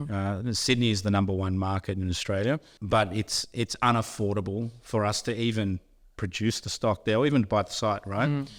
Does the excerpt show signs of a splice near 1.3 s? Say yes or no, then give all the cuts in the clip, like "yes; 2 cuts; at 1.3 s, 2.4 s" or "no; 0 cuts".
no; 1 cut; at 2.7 s